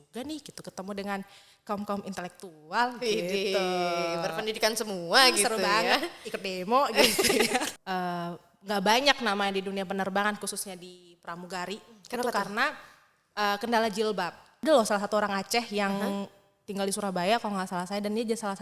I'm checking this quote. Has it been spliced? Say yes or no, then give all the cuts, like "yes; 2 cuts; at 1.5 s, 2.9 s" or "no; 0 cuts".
yes; 2 cuts; at 7.8 s, 14.6 s